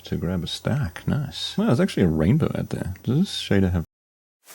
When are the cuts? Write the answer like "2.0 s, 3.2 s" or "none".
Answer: 1.4 s